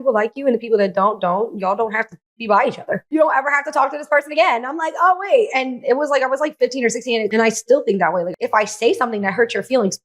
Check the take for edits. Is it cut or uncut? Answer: cut